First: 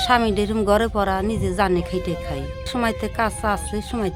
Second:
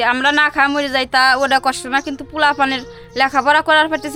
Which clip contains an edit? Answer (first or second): first